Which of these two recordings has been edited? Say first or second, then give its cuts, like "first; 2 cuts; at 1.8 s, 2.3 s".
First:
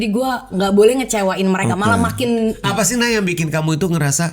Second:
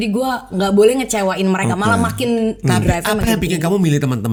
first; 1 cut; at 2.6 s